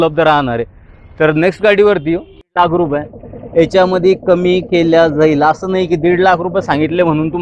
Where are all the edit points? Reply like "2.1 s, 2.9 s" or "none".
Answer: 2.6 s